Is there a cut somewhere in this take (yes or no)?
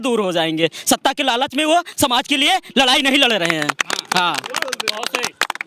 no